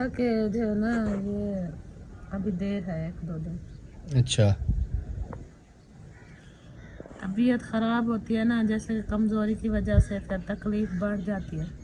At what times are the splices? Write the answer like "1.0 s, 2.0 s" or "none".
none